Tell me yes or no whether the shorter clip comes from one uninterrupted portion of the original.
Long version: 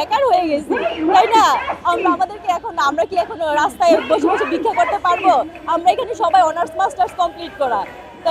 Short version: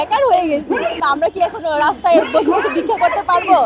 no